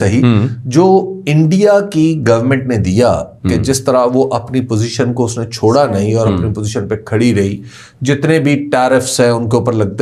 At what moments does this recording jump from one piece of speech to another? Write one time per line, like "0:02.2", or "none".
none